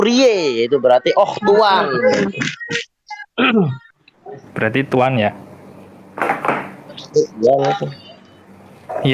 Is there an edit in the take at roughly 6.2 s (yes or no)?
no